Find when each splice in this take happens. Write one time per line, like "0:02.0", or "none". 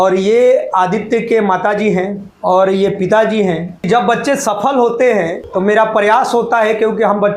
0:02.2
0:03.9
0:05.4

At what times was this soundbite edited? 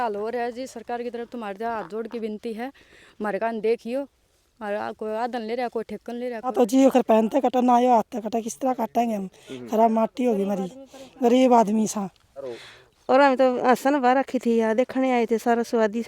0:06.4
0:12.6

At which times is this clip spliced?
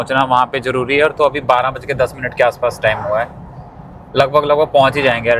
none

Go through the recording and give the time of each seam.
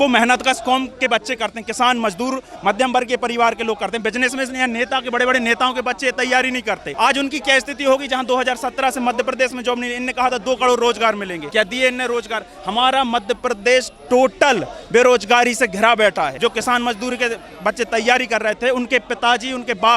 0:06.9
0:11.4
0:16.3

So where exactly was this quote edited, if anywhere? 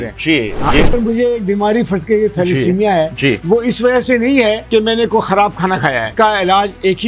0:00.9
0:04.6
0:06.1

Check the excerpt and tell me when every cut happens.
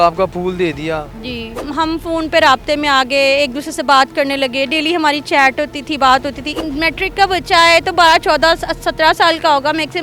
0:01.6
0:06.5

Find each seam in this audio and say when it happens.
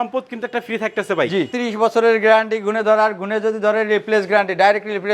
0:01.5

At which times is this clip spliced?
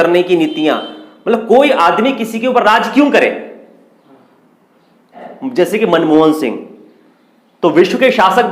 0:05.3

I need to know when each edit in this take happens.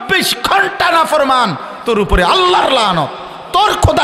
none

